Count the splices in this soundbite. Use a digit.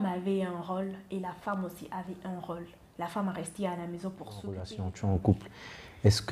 1